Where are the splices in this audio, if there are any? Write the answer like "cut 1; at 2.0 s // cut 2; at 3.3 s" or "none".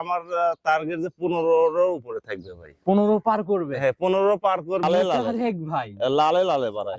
cut 1; at 4.8 s